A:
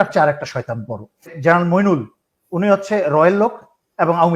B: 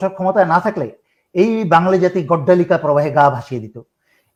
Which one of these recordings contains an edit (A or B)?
A